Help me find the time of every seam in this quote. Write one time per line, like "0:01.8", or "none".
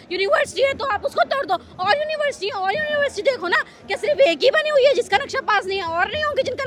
none